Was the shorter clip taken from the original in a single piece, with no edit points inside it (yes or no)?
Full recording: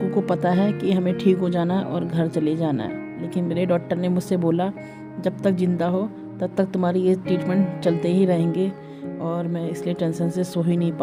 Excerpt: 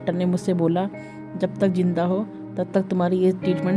yes